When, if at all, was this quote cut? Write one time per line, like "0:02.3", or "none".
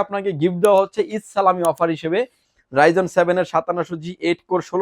0:02.4